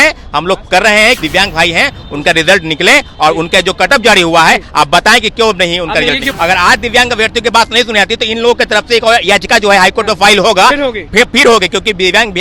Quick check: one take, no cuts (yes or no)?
no